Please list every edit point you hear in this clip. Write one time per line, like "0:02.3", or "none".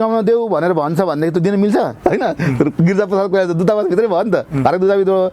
0:01.9